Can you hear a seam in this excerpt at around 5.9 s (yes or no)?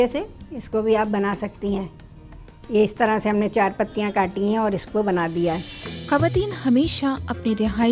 yes